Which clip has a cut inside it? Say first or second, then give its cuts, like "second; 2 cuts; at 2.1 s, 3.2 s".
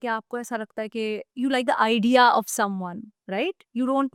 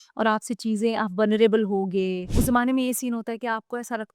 second; 1 cut; at 2.2 s